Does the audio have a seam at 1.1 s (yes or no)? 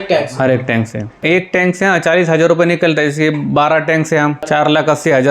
yes